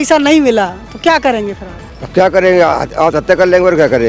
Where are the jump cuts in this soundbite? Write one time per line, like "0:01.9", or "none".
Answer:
none